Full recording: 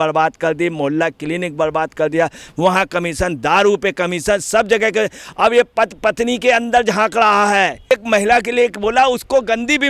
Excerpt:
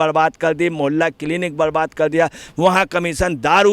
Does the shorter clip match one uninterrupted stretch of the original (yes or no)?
yes